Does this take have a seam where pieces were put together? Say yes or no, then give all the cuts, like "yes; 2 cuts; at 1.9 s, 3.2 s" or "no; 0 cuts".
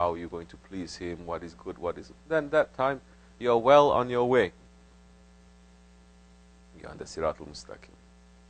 yes; 1 cut; at 2.2 s